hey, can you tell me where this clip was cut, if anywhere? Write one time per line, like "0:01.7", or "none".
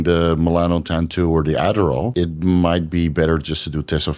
0:02.1